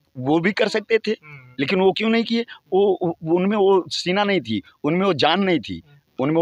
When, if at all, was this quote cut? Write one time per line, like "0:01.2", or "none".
none